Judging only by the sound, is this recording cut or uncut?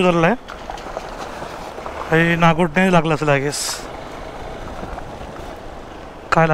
uncut